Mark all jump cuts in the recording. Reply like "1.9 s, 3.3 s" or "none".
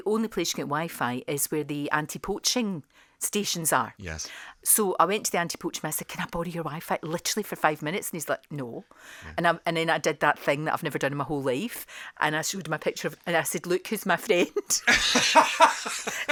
none